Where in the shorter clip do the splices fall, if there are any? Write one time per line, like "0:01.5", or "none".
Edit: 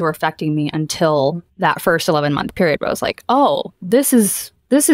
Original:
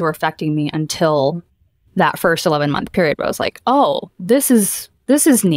0:01.5